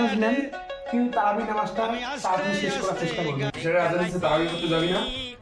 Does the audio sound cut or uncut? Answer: cut